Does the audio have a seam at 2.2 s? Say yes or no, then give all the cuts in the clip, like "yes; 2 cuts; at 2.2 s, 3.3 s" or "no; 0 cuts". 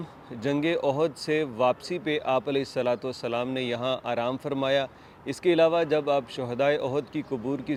no; 0 cuts